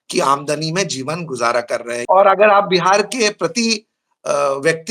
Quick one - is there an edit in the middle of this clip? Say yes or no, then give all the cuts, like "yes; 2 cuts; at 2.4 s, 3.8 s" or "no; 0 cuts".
yes; 1 cut; at 2.0 s